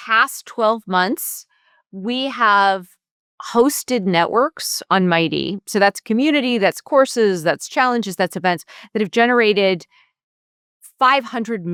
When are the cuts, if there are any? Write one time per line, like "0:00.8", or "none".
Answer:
none